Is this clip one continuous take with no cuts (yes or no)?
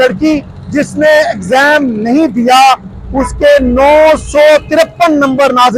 yes